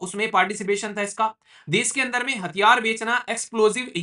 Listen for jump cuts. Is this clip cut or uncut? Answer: uncut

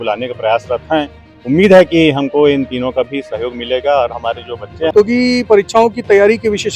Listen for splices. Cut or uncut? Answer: cut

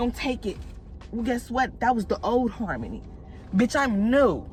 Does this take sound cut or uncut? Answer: uncut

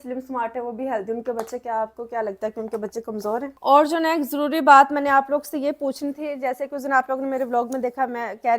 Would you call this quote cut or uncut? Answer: cut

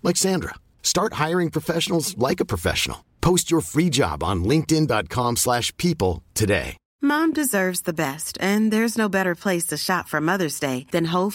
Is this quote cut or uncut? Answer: cut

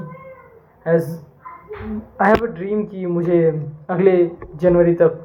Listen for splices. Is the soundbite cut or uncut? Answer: uncut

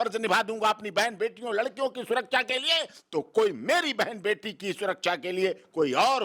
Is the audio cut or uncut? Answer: uncut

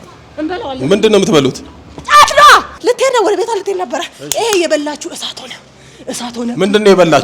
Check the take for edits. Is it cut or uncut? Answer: cut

